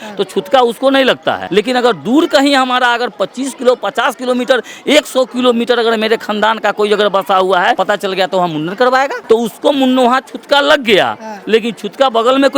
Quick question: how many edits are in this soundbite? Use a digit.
3